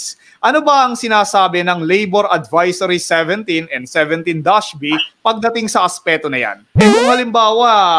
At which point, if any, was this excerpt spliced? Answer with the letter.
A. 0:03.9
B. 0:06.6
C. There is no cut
B